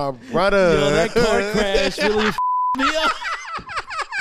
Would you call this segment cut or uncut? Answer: uncut